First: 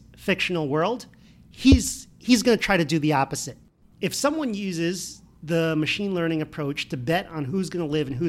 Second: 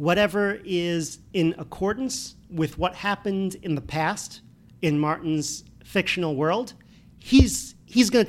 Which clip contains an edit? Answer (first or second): first